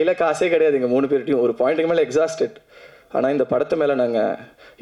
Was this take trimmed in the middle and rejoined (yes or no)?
no